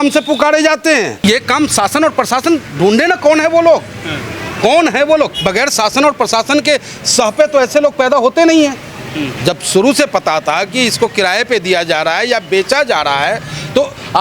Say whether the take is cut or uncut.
cut